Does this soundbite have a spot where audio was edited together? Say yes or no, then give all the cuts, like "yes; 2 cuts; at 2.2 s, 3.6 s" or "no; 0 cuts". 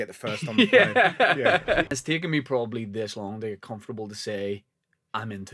yes; 1 cut; at 1.8 s